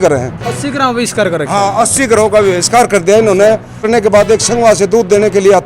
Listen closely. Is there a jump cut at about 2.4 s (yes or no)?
no